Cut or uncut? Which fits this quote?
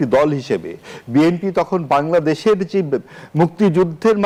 uncut